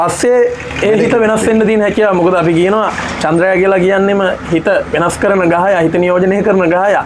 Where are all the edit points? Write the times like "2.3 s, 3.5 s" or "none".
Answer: none